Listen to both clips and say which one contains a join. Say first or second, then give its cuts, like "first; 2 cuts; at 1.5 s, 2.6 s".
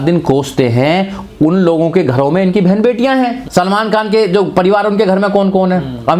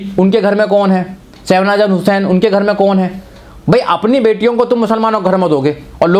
first; 1 cut; at 3.4 s